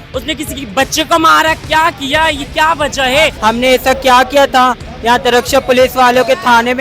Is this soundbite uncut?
no; 1 cut; at 3.4 s

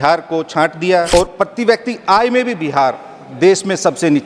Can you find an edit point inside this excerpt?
yes; 1 cut; at 1.1 s

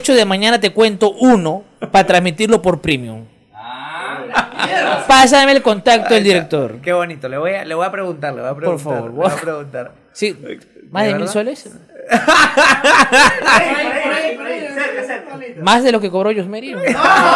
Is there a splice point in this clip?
no; 0 cuts

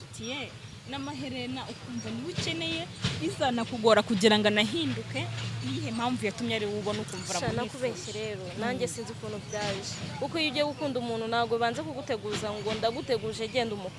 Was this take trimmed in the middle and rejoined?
no; 0 cuts

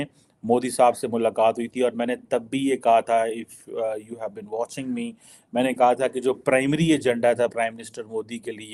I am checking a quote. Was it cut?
no; 0 cuts

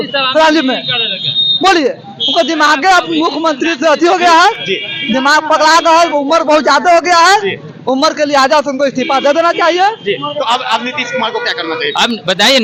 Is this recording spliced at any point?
no; 0 cuts

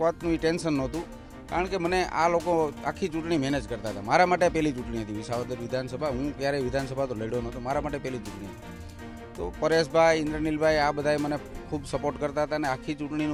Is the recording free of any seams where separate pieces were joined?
yes; 0 cuts

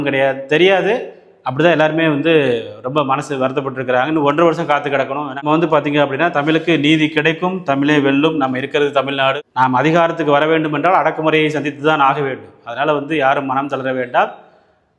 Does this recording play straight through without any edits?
no; 2 cuts; at 5.4 s, 9.3 s

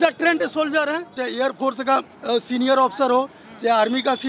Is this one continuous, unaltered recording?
no; 1 cut; at 1.2 s

